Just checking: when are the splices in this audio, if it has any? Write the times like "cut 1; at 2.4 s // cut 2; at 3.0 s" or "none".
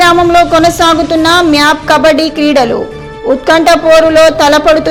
none